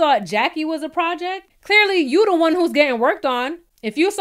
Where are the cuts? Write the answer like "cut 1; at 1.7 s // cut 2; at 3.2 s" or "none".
cut 1; at 1.4 s